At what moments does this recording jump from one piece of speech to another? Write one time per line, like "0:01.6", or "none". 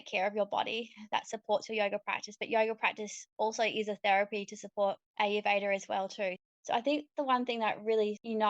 0:06.5